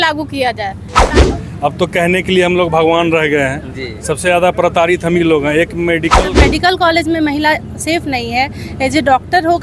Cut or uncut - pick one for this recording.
cut